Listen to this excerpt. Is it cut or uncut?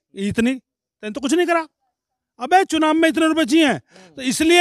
uncut